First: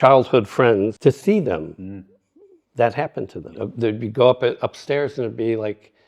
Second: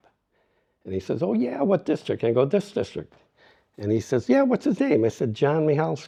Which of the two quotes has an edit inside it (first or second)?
first